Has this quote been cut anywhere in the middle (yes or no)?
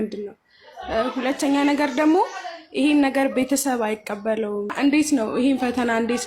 yes